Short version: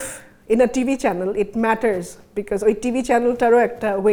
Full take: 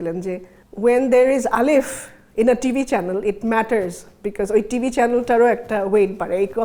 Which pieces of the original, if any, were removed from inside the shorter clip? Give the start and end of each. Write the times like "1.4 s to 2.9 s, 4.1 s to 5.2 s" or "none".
none